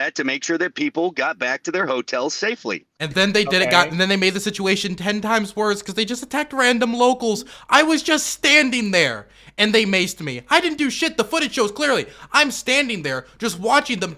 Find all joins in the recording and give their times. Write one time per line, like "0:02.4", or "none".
none